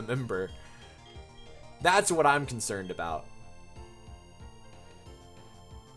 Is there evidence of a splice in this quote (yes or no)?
no